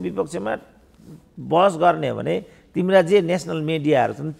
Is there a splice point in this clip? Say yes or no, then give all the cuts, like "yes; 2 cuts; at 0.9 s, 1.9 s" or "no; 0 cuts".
no; 0 cuts